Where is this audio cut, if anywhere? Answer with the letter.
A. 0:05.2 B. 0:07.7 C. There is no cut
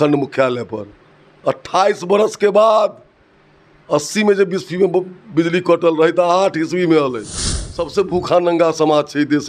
B